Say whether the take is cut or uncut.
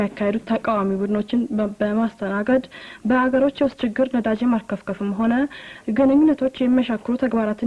uncut